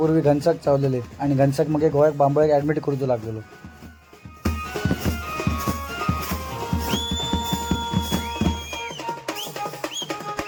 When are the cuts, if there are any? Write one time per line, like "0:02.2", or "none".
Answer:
none